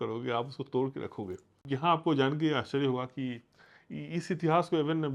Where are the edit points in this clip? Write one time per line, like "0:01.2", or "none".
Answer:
0:01.6